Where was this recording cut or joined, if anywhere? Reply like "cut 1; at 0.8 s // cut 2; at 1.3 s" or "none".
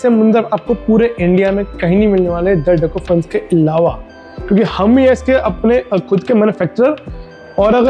none